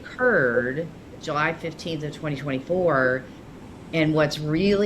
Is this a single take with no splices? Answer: no; 1 cut; at 1.2 s

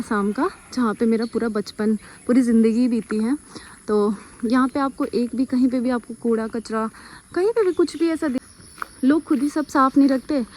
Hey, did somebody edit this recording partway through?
yes; 1 cut; at 8.4 s

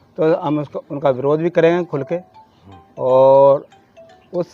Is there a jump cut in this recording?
no; 0 cuts

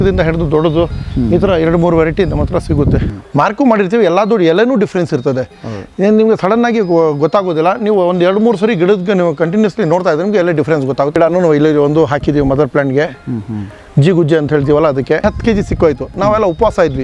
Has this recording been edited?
yes; 3 cuts; at 3.1 s, 11.1 s, 15.2 s

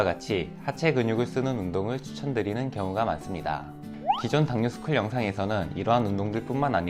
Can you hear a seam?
no; 0 cuts

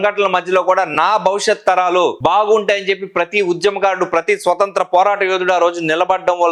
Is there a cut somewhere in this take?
no; 0 cuts

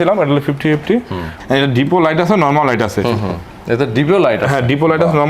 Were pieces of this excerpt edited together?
yes; 1 cut; at 1.3 s

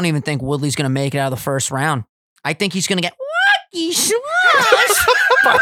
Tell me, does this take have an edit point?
no; 0 cuts

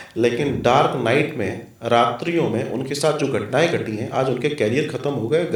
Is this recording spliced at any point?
no; 0 cuts

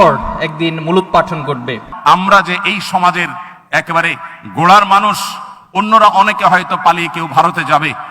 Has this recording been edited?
yes; 1 cut; at 1.9 s

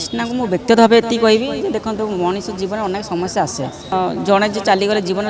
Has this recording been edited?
yes; 1 cut; at 3.9 s

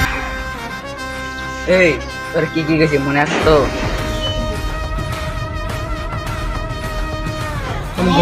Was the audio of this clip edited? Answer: no; 0 cuts

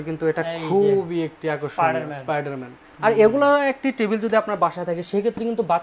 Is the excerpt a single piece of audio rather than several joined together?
yes; 0 cuts

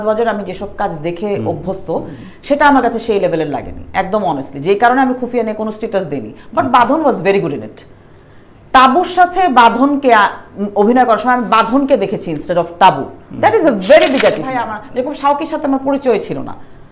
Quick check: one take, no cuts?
no; 1 cut; at 14.8 s

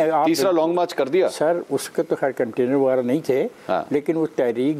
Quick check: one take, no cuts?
yes; 0 cuts

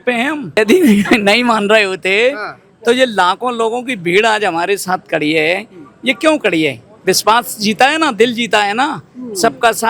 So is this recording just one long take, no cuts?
yes; 0 cuts

